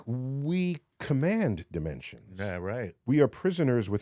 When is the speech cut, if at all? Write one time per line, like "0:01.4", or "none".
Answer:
0:00.9

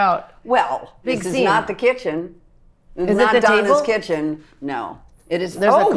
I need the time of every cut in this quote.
0:01.1

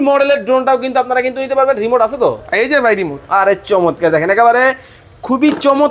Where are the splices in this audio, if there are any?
none

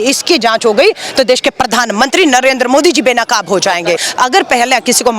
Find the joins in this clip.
0:04.0

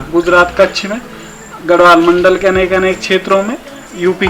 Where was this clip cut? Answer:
none

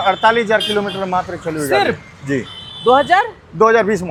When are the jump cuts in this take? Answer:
none

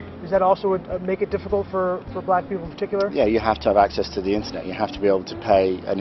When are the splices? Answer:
none

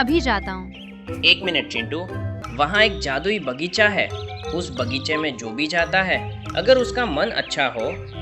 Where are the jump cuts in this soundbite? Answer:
0:02.3

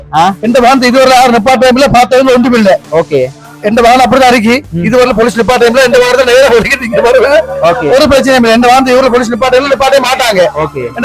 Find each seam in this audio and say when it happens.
none

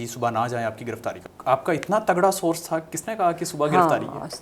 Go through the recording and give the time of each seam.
0:01.2

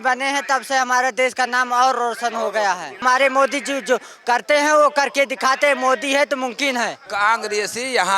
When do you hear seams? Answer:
0:03.0
0:07.0

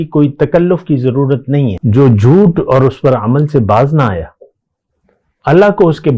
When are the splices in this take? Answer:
0:01.8

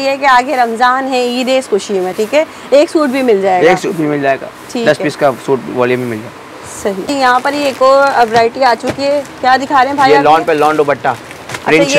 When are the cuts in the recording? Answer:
none

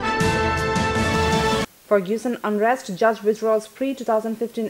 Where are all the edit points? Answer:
0:01.5

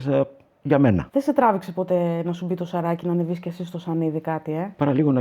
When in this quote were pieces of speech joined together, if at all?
0:01.1

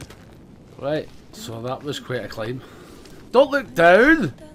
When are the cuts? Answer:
none

